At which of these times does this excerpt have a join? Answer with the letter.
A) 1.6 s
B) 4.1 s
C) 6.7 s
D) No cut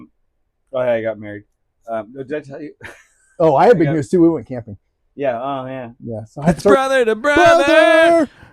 C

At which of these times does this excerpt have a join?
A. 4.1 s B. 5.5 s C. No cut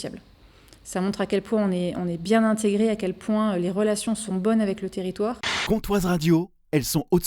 B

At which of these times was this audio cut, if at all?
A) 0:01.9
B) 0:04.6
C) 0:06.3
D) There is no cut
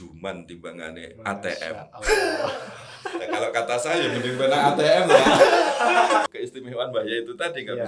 C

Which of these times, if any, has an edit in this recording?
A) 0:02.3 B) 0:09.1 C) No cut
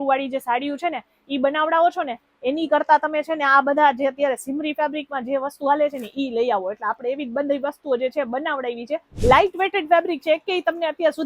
B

